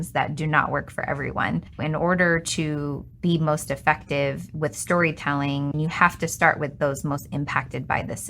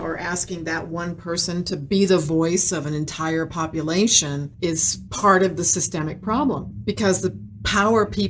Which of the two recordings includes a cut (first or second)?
first